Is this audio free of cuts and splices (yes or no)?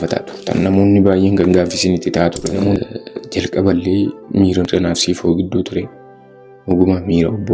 no